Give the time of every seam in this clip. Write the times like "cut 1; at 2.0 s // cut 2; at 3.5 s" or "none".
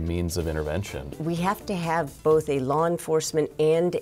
cut 1; at 1.2 s